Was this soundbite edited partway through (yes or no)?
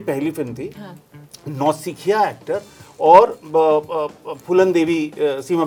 no